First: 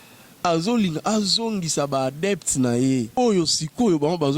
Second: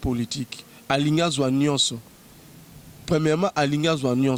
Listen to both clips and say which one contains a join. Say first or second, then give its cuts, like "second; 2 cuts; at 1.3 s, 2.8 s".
first; 1 cut; at 3.2 s